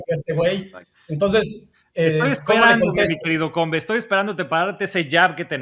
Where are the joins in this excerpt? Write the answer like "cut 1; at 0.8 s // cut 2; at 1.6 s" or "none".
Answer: none